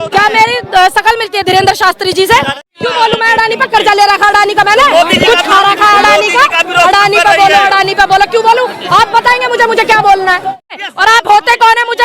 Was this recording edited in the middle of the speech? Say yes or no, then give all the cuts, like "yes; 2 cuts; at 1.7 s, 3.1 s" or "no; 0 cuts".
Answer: yes; 2 cuts; at 2.7 s, 10.8 s